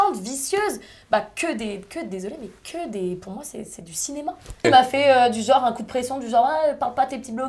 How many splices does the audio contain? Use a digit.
1